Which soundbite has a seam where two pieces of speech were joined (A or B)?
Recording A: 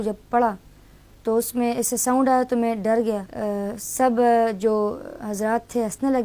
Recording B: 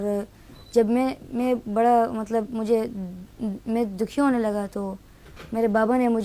A